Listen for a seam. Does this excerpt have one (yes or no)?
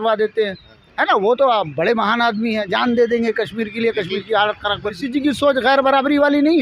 yes